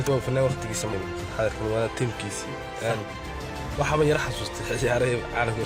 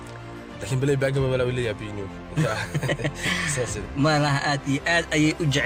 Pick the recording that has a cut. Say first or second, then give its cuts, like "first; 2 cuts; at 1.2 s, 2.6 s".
first; 1 cut; at 0.9 s